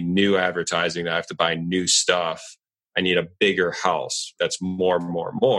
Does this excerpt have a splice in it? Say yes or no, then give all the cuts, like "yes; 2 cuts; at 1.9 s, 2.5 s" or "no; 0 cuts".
yes; 1 cut; at 4.3 s